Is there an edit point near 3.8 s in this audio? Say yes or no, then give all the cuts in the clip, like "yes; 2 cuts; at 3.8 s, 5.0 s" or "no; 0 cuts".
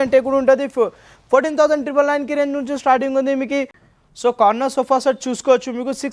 yes; 1 cut; at 3.8 s